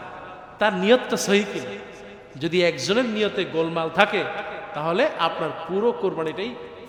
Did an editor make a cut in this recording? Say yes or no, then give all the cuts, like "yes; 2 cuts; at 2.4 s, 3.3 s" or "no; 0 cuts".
no; 0 cuts